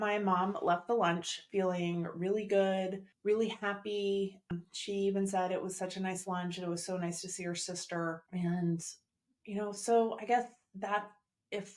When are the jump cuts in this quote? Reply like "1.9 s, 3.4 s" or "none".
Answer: 3.1 s, 4.5 s, 8.2 s